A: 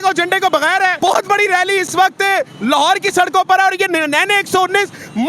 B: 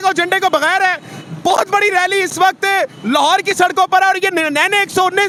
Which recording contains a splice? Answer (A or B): A